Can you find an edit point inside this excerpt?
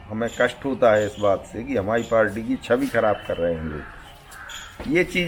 no; 0 cuts

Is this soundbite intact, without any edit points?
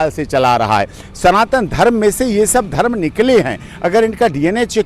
yes; 0 cuts

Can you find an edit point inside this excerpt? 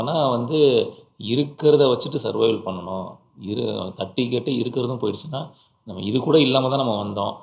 no; 0 cuts

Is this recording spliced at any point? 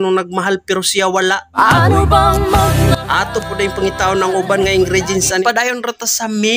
yes; 1 cut; at 5.4 s

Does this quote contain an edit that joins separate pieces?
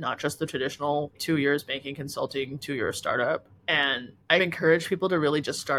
no; 0 cuts

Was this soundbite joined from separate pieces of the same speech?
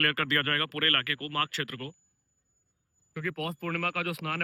no; 0 cuts

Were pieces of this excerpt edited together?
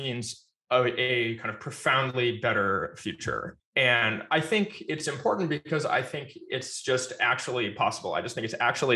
no; 0 cuts

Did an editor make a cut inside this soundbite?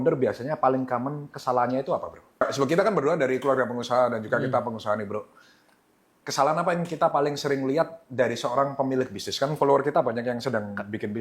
yes; 1 cut; at 2.4 s

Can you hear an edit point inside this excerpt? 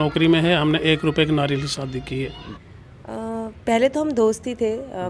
yes; 1 cut; at 2.5 s

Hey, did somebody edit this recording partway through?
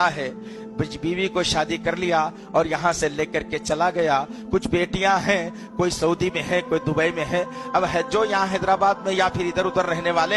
no; 0 cuts

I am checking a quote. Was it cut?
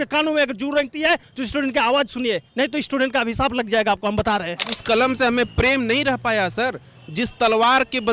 yes; 1 cut; at 4.8 s

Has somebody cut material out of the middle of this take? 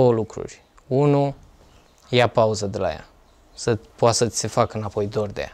no; 0 cuts

